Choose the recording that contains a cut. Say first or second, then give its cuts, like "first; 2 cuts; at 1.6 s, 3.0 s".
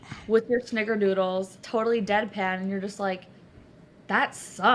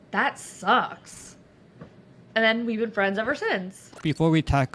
second; 1 cut; at 3.8 s